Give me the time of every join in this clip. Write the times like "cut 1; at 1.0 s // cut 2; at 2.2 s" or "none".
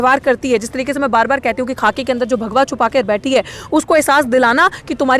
none